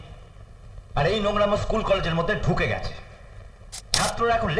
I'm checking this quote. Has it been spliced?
no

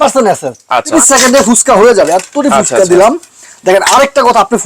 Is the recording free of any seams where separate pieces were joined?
no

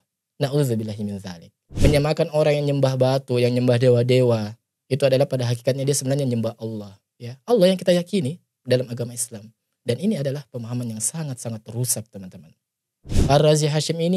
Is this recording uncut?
no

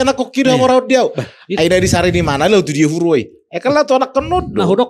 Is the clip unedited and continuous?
yes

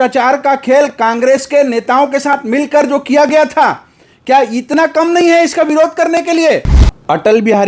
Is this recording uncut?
no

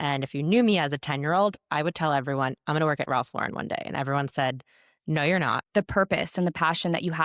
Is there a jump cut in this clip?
yes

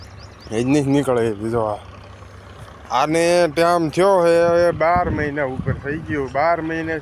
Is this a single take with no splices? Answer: yes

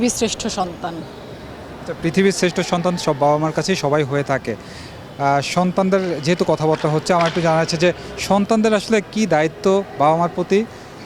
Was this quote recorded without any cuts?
yes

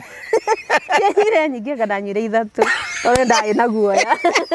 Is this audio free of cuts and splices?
yes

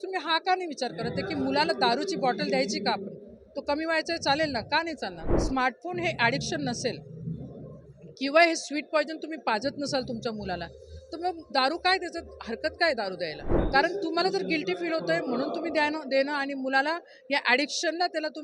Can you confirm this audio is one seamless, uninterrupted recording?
no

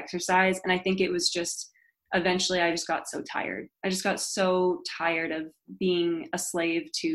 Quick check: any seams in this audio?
no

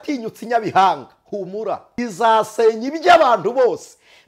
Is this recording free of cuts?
no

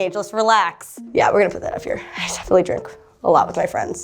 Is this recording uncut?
no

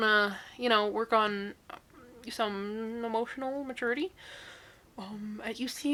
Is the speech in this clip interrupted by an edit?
no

